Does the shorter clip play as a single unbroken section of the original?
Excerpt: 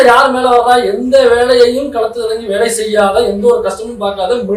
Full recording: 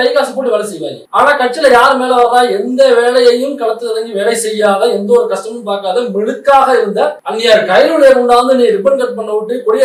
yes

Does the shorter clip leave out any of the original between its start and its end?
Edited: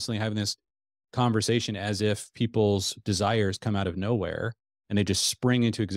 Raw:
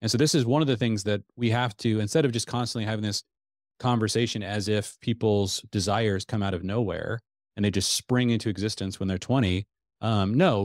no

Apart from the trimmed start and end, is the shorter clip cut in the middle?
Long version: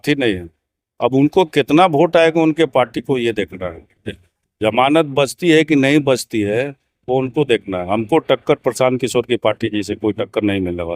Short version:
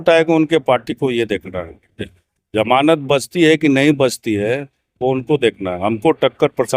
no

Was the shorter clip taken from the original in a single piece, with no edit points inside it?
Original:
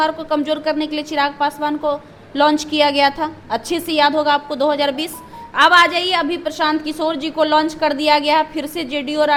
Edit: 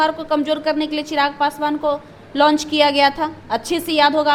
yes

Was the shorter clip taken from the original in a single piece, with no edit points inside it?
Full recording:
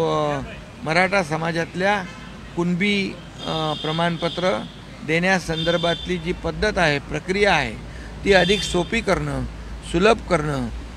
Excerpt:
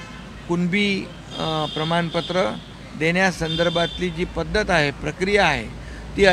yes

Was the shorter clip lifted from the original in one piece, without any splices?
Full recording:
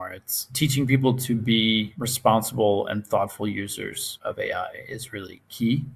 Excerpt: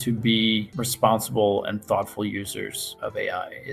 yes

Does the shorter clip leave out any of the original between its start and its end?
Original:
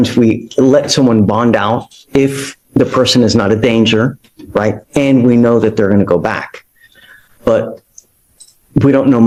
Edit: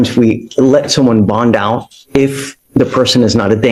no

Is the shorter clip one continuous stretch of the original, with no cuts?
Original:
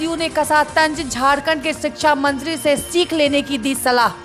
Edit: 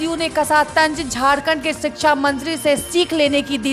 yes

